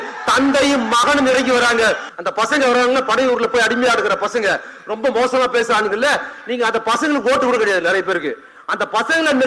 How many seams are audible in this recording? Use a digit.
1